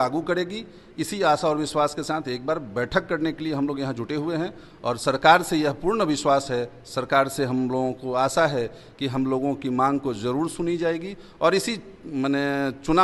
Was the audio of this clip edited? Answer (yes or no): no